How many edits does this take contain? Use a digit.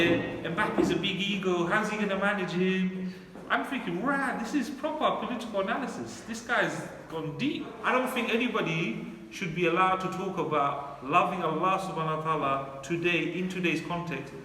1